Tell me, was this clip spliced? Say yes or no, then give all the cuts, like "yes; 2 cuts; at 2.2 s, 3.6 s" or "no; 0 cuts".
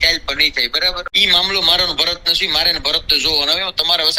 yes; 1 cut; at 1.1 s